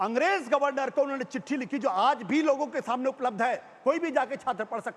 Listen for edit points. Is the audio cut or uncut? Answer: uncut